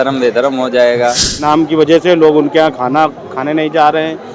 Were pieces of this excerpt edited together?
yes; 1 cut; at 1.4 s

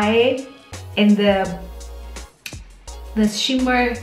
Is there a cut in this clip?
yes; 2 cuts; at 1.7 s, 3.1 s

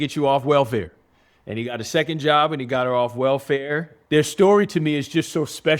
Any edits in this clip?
yes; 1 cut; at 3.9 s

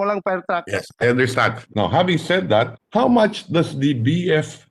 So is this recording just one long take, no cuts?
no; 2 cuts; at 1.6 s, 2.8 s

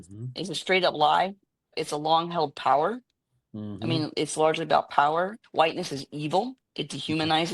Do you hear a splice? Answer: yes; 2 cuts; at 1.7 s, 5.4 s

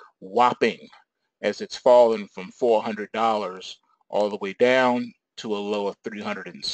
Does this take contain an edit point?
yes; 1 cut; at 1.9 s

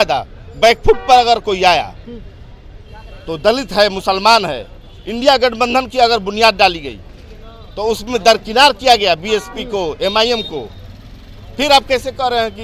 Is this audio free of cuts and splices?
yes; 0 cuts

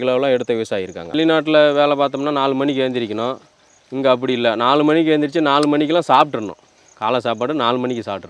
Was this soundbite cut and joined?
yes; 1 cut; at 1.1 s

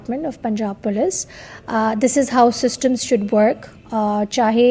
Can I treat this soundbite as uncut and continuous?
yes; 0 cuts

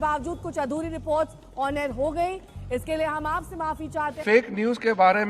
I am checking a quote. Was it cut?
yes; 1 cut; at 4.1 s

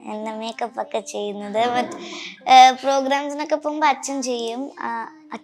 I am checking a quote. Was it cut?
no; 0 cuts

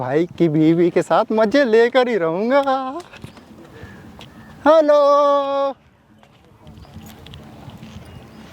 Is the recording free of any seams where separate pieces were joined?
yes; 0 cuts

